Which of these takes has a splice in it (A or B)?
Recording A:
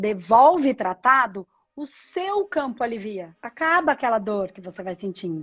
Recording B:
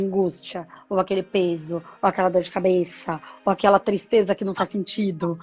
A